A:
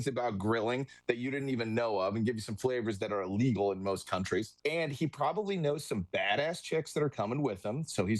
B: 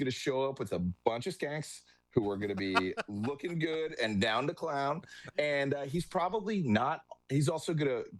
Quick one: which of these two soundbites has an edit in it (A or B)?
A